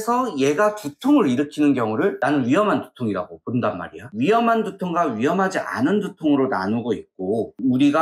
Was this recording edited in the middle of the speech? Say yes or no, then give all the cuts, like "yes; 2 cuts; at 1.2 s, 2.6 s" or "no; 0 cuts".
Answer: yes; 1 cut; at 4.1 s